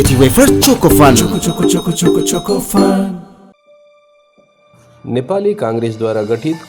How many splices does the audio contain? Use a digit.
1